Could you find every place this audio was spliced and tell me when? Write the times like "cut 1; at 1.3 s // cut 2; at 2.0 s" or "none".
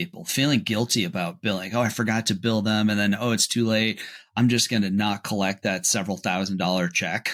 none